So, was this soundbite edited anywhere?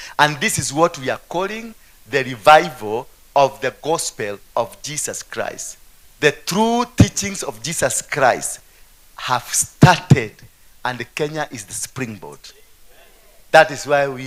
no; 0 cuts

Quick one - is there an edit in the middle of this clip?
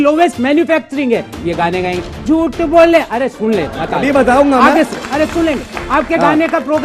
no; 0 cuts

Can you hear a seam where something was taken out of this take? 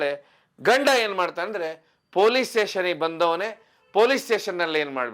no; 0 cuts

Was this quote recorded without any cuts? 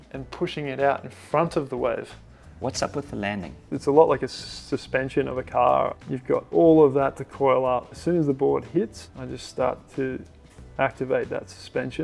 no; 3 cuts; at 2.5 s, 3.6 s, 6.0 s

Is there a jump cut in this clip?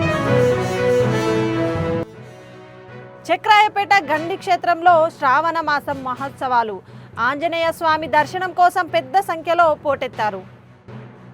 yes; 1 cut; at 2.0 s

